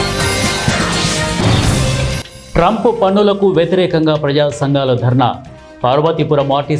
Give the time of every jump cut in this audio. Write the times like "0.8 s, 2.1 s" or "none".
0.9 s